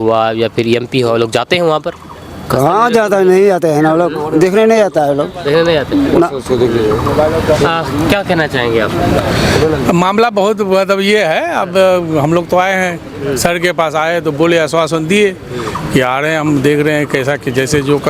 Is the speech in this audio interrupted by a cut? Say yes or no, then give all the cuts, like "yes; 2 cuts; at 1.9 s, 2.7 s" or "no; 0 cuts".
no; 0 cuts